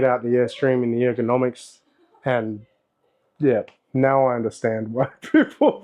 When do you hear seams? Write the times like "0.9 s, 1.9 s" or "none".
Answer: none